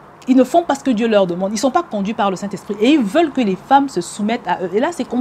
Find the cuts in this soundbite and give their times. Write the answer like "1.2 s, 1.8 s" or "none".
none